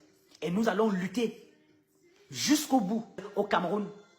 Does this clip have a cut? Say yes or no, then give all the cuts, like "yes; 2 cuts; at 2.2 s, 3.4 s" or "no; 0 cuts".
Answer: yes; 1 cut; at 3.3 s